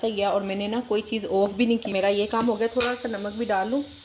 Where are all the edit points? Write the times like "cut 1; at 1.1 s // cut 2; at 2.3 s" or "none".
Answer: cut 1; at 1.9 s